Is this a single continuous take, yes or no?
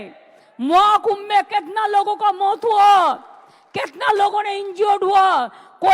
yes